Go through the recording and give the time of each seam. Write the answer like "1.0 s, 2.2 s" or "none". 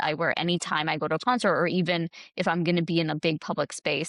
none